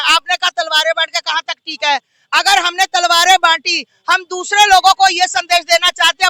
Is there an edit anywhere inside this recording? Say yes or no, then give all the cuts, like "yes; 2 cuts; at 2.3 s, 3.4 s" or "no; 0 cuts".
no; 0 cuts